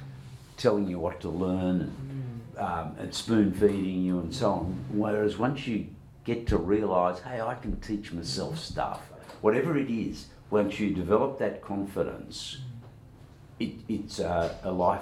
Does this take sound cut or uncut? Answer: cut